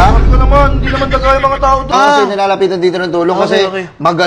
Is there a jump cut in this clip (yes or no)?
yes